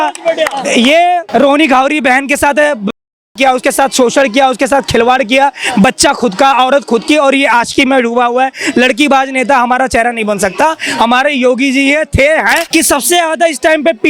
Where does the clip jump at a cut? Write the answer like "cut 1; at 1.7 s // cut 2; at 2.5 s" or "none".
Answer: cut 1; at 1.2 s // cut 2; at 12.6 s